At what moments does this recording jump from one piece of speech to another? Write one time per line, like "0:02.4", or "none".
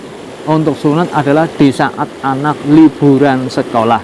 none